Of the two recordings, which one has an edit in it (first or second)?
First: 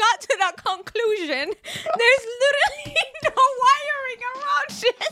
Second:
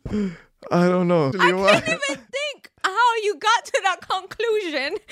second